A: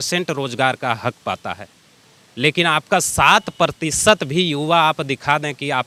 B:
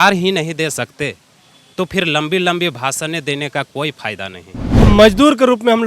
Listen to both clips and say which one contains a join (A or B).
B